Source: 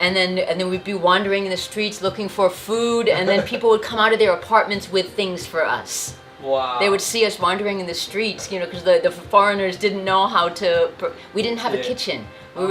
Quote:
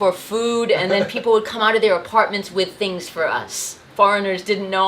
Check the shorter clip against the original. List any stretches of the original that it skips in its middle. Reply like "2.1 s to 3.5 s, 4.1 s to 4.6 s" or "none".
6.2 s to 9.2 s